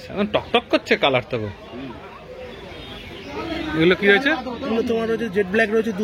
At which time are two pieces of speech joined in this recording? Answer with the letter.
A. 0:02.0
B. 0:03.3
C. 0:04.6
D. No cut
B